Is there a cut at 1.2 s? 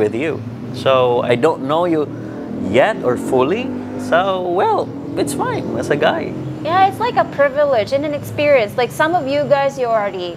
no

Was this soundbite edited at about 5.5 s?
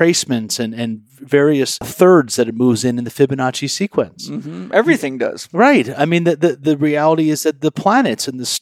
no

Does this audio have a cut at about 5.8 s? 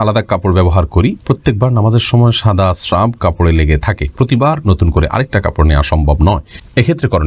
no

